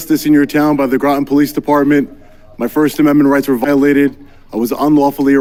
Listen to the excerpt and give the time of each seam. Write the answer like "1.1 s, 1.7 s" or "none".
none